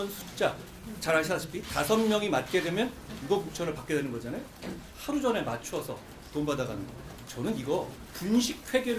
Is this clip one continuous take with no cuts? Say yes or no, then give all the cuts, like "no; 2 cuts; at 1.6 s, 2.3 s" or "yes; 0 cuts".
no; 1 cut; at 8.0 s